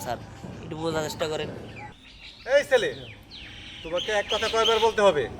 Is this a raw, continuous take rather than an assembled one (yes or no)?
yes